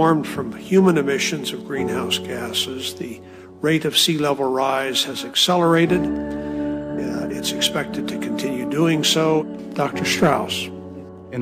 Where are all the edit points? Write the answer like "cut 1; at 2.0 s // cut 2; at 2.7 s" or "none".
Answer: cut 1; at 6.1 s